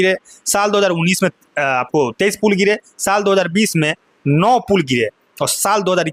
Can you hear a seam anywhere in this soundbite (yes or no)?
no